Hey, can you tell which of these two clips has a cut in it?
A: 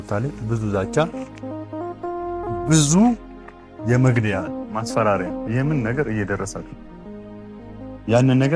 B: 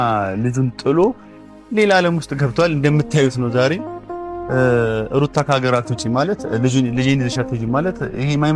A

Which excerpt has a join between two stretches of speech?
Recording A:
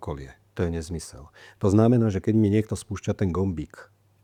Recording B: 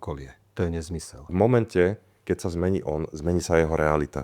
B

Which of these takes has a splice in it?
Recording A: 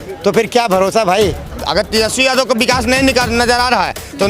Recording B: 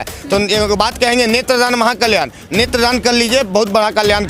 A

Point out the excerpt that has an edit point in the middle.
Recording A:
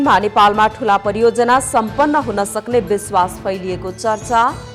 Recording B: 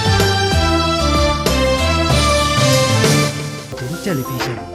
B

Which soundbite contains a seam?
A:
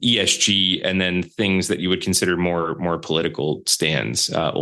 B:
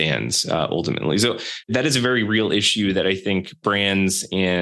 B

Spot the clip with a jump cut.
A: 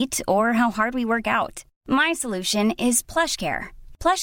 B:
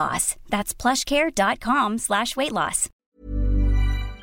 B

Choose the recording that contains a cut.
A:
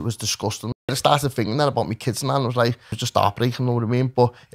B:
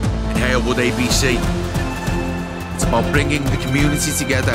A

